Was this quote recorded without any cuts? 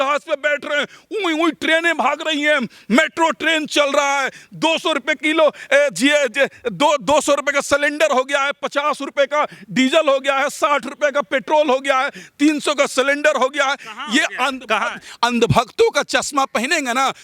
yes; 0 cuts

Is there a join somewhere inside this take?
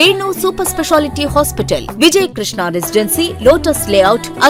no; 0 cuts

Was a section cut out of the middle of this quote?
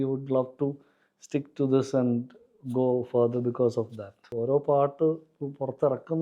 yes; 1 cut; at 4.3 s

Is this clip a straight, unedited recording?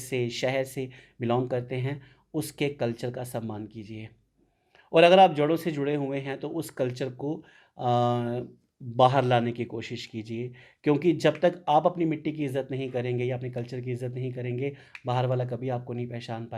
yes; 0 cuts

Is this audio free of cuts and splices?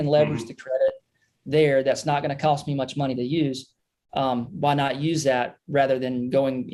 yes; 0 cuts

